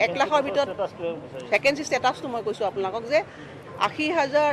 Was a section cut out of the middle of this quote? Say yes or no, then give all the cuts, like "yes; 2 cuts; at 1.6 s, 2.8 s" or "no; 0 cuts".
yes; 1 cut; at 2.7 s